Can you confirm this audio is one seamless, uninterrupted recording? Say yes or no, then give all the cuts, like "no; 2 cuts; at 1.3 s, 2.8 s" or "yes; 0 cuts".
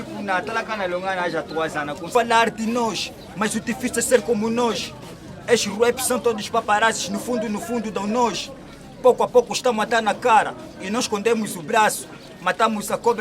no; 1 cut; at 2.1 s